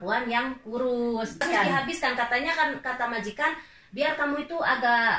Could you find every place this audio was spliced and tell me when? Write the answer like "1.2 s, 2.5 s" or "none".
1.4 s

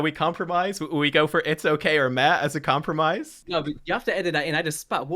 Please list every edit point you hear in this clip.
3.4 s

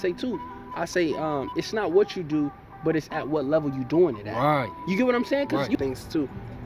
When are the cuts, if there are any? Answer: 5.8 s

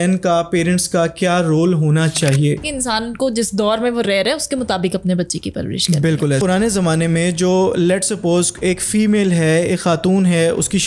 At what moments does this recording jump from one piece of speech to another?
2.6 s, 6.4 s

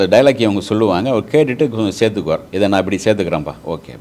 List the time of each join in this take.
2.5 s

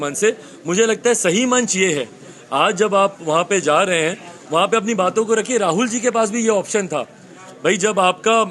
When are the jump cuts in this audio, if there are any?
none

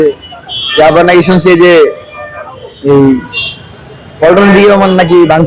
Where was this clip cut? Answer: none

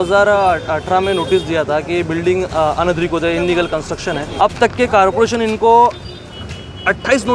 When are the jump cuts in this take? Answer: 4.2 s

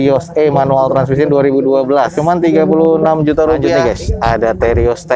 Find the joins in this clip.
2.1 s, 3.7 s

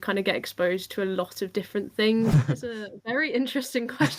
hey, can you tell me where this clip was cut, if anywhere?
2.3 s

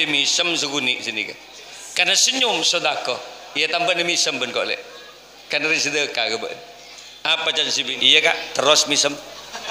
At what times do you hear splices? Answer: 8.0 s

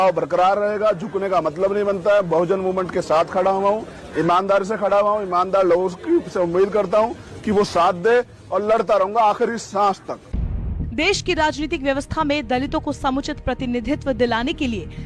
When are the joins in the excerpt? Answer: none

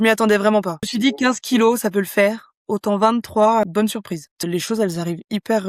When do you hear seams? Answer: 0.9 s, 4.4 s

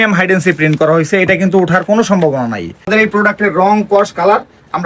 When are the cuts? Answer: 2.9 s

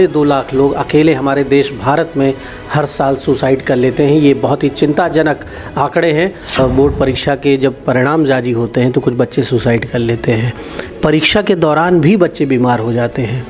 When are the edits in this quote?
6.6 s

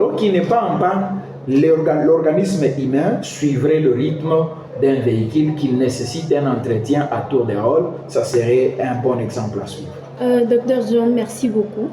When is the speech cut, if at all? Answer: none

